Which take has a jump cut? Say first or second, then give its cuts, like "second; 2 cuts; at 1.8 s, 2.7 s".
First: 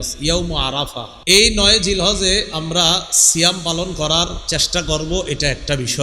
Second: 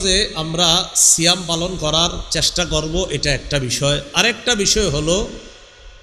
first; 1 cut; at 1.1 s